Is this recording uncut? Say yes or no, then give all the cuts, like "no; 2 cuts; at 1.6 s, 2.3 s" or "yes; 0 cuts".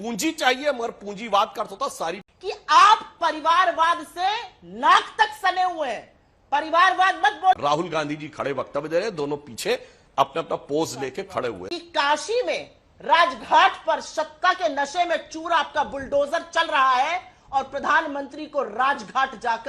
no; 3 cuts; at 2.3 s, 7.5 s, 11.7 s